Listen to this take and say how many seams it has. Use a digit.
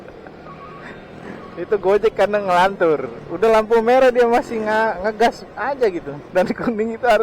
1